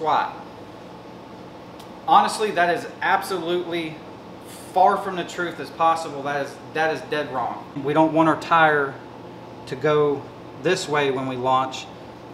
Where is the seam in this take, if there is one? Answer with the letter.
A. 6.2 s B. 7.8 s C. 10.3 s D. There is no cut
B